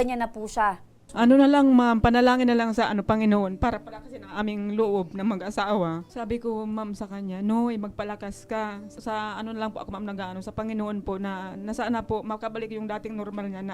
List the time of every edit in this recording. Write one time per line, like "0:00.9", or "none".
0:00.9